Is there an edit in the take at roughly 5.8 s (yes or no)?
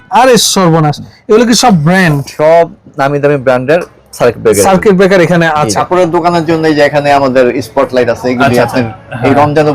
yes